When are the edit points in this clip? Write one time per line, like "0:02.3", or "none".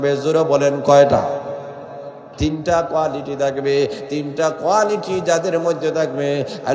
0:02.3